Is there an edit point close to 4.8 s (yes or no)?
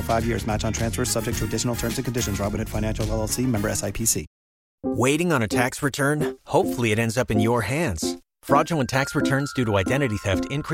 yes